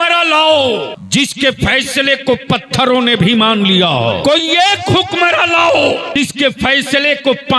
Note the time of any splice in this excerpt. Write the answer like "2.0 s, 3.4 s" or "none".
1.0 s, 4.2 s, 6.2 s